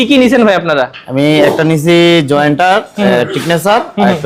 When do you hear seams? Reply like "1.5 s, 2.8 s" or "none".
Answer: none